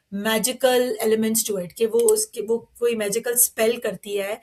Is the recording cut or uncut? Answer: uncut